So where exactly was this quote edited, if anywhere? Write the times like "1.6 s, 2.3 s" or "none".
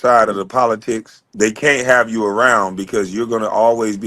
1.2 s